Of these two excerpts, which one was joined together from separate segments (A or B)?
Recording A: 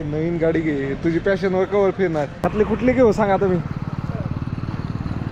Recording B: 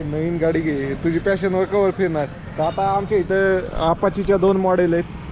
A